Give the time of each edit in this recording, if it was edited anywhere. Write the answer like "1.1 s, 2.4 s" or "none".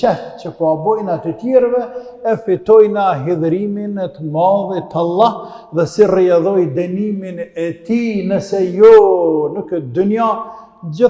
none